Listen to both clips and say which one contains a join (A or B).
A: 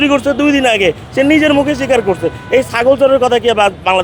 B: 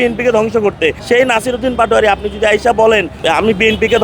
B